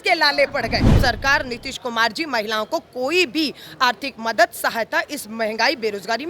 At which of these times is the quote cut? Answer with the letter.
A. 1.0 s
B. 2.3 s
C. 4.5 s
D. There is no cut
A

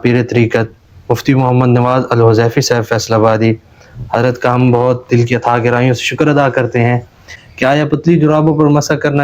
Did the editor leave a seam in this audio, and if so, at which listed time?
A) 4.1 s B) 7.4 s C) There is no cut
B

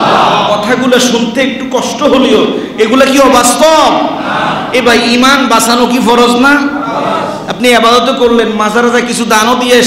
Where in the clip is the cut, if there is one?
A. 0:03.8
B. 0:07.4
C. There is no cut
C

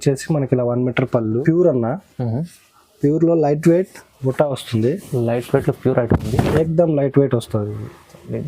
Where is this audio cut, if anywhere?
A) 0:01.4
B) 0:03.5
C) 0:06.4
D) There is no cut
A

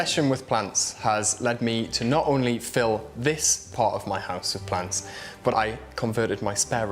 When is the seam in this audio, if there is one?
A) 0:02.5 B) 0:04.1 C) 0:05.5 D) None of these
C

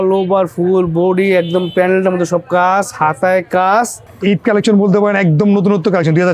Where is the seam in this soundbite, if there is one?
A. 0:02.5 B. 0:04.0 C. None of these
B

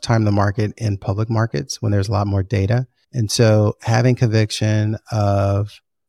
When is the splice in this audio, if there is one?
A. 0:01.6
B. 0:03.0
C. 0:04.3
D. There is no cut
B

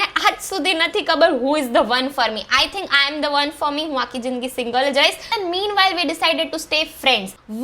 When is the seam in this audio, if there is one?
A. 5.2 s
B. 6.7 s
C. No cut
A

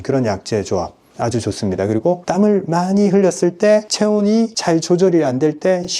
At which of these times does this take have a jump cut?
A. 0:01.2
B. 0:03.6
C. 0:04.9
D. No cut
D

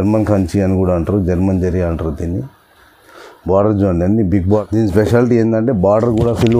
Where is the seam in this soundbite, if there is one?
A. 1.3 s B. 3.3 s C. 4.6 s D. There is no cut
C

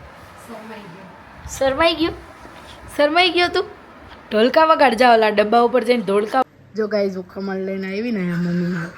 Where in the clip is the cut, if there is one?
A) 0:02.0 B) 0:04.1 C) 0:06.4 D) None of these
C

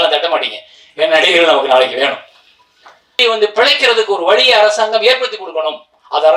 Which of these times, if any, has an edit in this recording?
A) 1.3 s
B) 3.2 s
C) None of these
B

